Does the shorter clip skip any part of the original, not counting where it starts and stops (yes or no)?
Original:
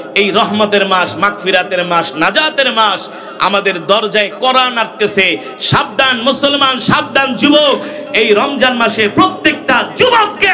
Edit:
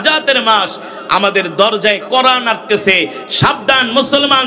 no